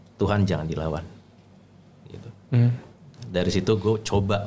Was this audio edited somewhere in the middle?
no; 0 cuts

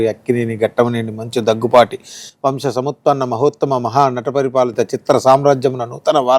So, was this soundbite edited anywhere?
no; 0 cuts

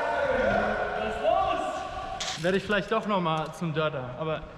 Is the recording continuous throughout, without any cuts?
no; 1 cut; at 2.2 s

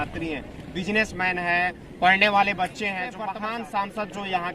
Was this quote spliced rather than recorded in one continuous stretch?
yes; 1 cut; at 3.2 s

